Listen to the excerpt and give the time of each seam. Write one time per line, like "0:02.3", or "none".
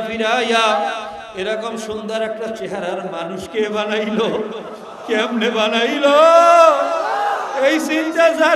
none